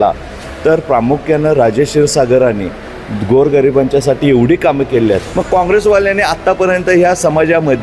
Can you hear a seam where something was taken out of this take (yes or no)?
yes